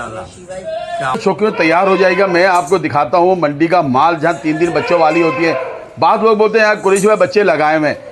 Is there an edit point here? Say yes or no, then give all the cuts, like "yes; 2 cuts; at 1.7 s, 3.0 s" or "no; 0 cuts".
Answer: yes; 1 cut; at 1.2 s